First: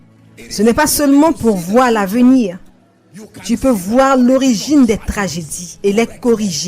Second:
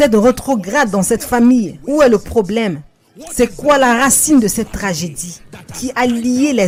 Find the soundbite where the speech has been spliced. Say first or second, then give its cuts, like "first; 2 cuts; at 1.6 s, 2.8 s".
first; 1 cut; at 5.7 s